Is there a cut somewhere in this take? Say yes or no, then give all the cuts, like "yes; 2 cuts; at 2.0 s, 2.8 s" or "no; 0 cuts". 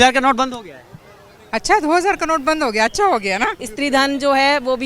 yes; 1 cut; at 3.7 s